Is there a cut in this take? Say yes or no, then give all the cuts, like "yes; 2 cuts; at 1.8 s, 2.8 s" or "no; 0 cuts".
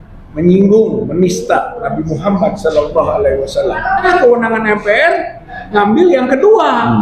yes; 1 cut; at 4.0 s